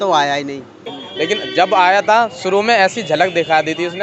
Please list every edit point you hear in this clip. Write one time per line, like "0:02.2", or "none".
0:01.0